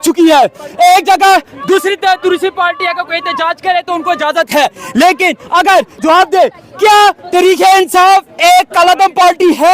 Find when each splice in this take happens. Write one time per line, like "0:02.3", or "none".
0:06.0